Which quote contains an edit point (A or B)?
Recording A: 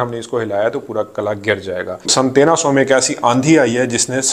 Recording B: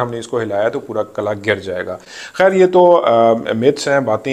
A